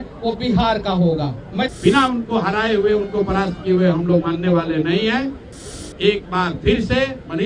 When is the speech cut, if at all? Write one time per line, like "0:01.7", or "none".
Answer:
0:01.7